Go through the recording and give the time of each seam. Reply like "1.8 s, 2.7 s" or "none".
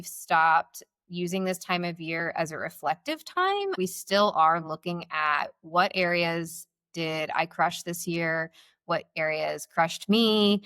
3.8 s